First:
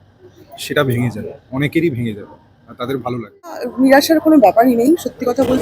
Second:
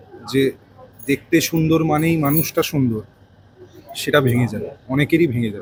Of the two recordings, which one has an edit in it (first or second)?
first